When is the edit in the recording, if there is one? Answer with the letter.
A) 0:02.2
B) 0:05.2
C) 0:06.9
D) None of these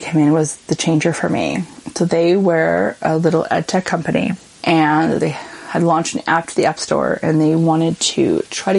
B